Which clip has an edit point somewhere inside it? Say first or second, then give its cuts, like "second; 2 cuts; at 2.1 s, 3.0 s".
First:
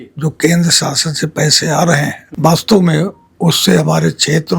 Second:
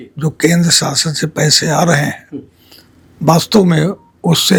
first; 1 cut; at 2.2 s